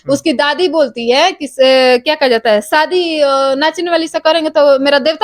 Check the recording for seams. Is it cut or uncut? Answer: uncut